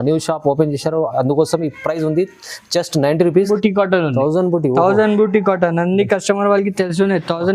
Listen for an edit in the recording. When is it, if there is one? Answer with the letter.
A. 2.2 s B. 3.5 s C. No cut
B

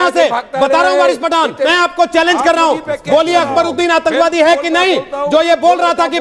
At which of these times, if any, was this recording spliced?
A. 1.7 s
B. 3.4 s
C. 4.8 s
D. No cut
A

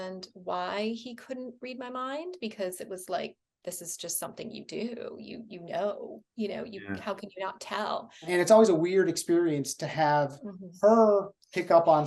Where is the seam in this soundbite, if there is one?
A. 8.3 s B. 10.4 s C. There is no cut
A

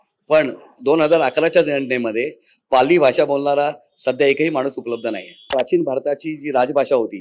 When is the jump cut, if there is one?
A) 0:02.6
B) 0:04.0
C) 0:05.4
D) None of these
C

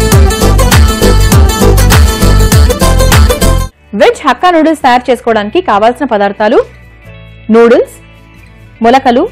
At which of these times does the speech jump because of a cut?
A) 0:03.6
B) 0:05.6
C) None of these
A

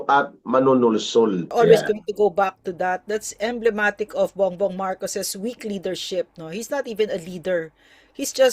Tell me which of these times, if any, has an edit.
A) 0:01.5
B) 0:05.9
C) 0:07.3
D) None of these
A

